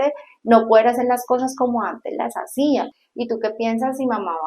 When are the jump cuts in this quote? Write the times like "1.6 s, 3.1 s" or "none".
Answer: 3.0 s